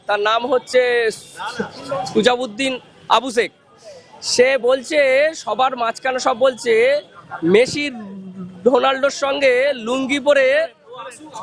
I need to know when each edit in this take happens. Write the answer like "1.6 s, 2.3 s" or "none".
none